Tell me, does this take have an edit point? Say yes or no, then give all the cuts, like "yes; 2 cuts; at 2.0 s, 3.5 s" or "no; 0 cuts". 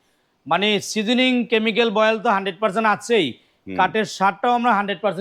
no; 0 cuts